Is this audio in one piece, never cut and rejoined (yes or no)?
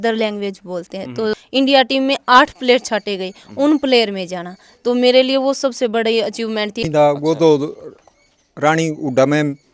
no